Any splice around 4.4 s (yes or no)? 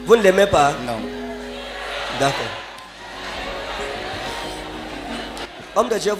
no